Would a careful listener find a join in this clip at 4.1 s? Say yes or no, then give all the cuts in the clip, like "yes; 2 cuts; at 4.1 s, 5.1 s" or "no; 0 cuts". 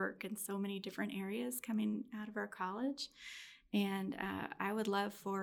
no; 0 cuts